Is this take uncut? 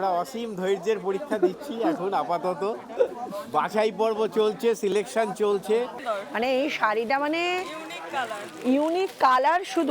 no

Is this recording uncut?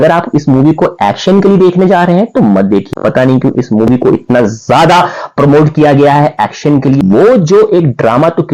no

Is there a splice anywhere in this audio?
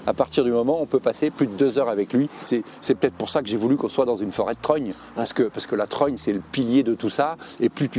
yes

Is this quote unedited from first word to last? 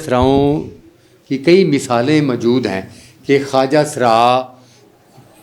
yes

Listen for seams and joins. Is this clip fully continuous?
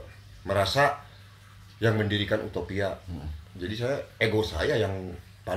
yes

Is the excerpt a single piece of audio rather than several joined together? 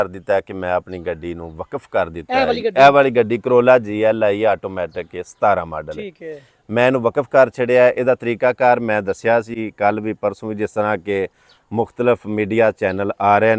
yes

